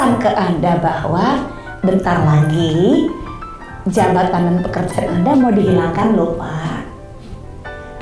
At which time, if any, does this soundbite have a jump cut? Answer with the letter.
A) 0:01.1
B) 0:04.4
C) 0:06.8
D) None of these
D